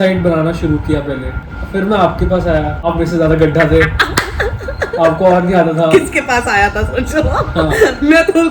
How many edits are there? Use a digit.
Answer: 2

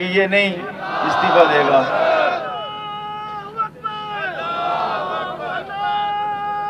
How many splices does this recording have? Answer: 0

